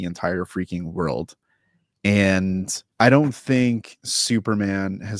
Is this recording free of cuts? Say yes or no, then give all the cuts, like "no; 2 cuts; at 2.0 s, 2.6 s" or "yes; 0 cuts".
no; 1 cut; at 2.8 s